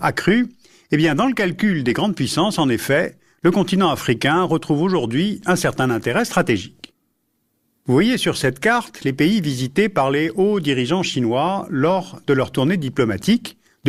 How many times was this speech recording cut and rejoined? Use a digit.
1